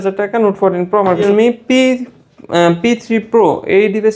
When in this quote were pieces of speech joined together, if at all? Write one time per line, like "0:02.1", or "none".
0:01.2